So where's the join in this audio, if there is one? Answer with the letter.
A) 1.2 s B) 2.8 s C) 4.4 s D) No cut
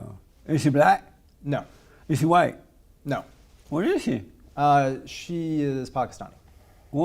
C